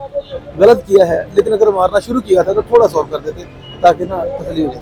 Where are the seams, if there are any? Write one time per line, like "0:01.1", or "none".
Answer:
none